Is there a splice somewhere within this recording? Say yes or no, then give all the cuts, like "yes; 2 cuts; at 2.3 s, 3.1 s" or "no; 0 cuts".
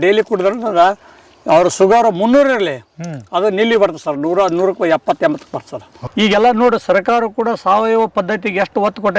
yes; 1 cut; at 6.0 s